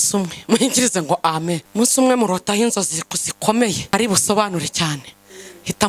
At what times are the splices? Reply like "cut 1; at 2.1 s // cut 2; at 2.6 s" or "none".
cut 1; at 1.6 s // cut 2; at 3.8 s